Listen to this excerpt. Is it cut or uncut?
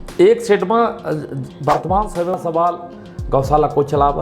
cut